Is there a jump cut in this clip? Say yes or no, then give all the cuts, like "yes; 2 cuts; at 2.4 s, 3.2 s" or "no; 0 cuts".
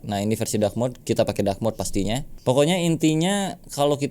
yes; 1 cut; at 2.3 s